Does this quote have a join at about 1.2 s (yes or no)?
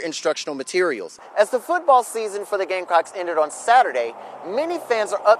yes